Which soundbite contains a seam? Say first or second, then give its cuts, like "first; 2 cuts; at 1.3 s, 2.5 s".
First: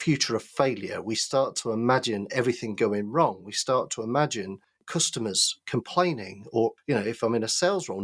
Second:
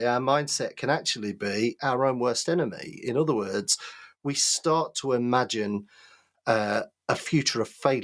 first; 2 cuts; at 4.9 s, 6.8 s